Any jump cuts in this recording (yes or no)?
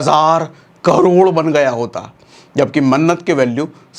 no